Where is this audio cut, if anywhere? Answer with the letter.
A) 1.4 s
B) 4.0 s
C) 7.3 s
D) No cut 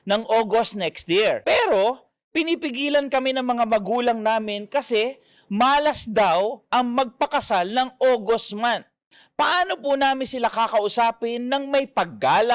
A